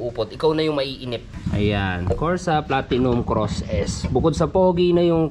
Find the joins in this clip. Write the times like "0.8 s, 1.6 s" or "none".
none